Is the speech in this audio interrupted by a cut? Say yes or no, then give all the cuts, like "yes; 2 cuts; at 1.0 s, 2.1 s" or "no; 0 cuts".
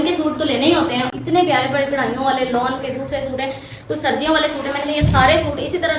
no; 0 cuts